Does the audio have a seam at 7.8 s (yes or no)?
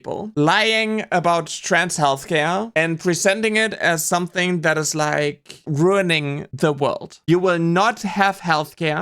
no